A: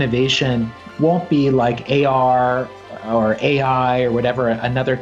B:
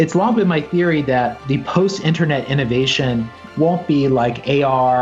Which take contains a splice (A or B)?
B